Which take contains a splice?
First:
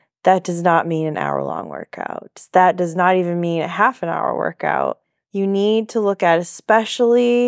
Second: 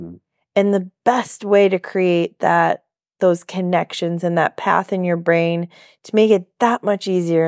first; 1 cut; at 5.1 s

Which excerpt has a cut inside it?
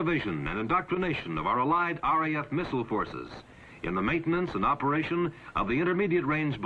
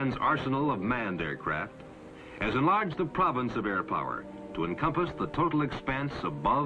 first; 1 cut; at 2.0 s

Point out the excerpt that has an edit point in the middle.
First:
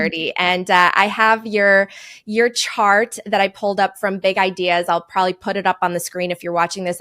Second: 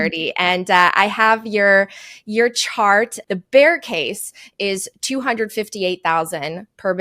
second; 1 cut; at 3.2 s

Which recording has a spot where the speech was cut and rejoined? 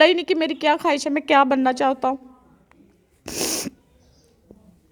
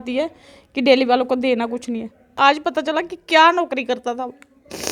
second; 1 cut; at 2.3 s

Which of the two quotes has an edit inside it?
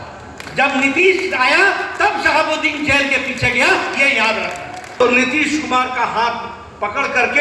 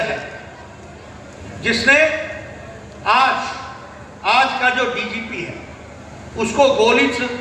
first; 1 cut; at 5.0 s

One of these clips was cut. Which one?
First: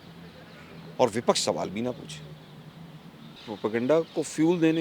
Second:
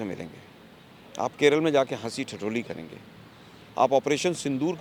first; 1 cut; at 3.5 s

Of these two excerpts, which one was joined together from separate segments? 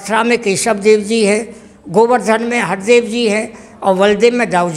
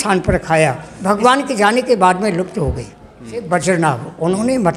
second; 2 cuts; at 0.9 s, 3.5 s

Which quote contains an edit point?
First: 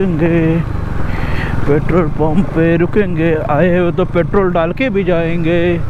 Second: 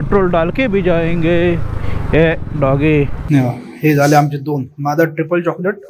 second; 1 cut; at 3.2 s

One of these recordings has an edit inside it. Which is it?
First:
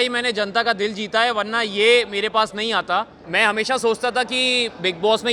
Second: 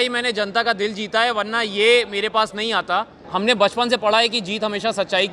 second; 1 cut; at 3.2 s

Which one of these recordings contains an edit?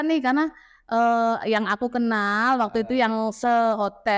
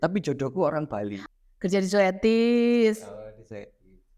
second; 1 cut; at 1.3 s

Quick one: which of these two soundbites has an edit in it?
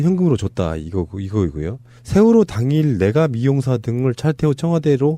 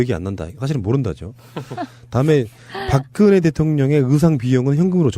second; 1 cut; at 2.0 s

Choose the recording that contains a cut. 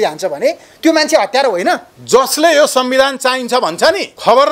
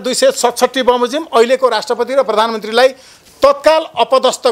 first; 1 cut; at 1.9 s

